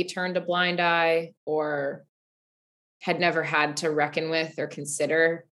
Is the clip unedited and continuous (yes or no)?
yes